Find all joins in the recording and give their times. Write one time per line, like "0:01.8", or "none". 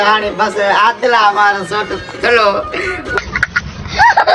0:03.1